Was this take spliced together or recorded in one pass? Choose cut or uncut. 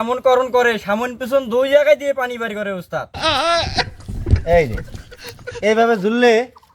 cut